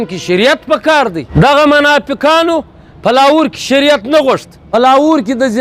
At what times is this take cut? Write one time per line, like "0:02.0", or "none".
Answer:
0:01.2
0:04.5